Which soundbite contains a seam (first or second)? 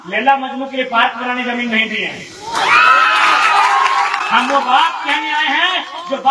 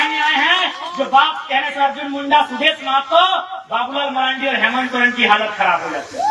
first